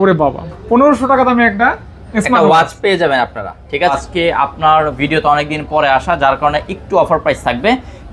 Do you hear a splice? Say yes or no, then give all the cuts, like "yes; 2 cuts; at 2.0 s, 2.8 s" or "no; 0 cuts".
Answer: yes; 1 cut; at 3.9 s